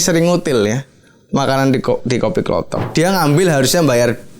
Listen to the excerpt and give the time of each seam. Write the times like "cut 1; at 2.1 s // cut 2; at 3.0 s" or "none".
cut 1; at 2.9 s

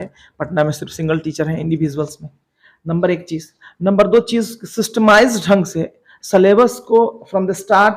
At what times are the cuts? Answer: none

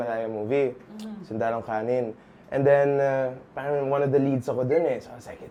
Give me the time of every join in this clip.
none

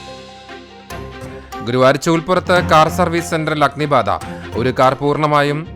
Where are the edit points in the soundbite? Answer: cut 1; at 1.3 s

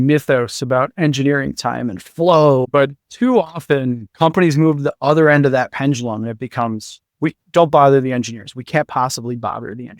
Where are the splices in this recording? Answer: cut 1; at 2.7 s // cut 2; at 4.1 s

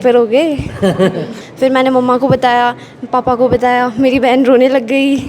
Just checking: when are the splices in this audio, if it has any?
cut 1; at 1.3 s

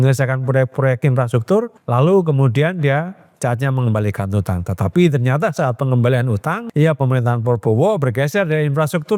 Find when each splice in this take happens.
cut 1; at 1.8 s // cut 2; at 6.6 s

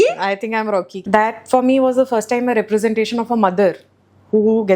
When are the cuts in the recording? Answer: cut 1; at 1.0 s

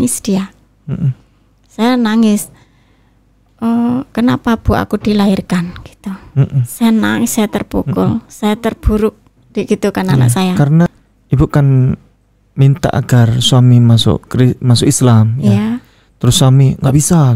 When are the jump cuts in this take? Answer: cut 1; at 10.9 s

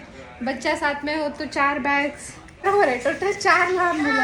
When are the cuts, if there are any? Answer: cut 1; at 2.6 s

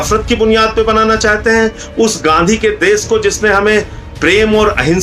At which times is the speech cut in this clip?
none

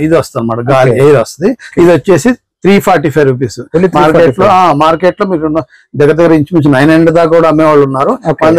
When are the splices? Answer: cut 1; at 1.6 s

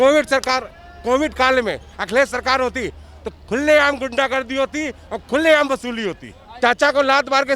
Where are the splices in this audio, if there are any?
cut 1; at 6.4 s

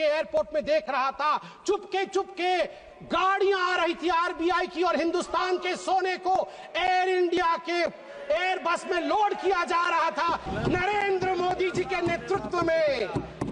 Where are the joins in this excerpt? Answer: cut 1; at 10.5 s

